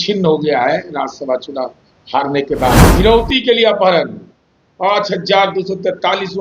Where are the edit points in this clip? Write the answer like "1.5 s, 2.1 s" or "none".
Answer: 2.9 s